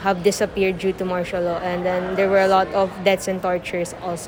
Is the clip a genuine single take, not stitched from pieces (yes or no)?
yes